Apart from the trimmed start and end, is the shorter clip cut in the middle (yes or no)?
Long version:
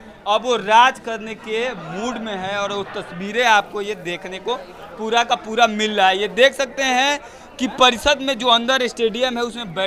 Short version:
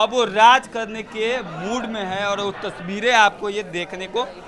no